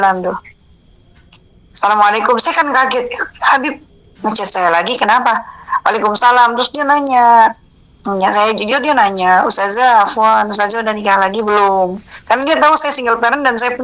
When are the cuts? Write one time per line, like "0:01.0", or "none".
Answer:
none

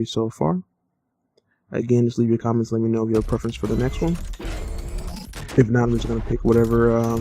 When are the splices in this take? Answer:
0:06.0

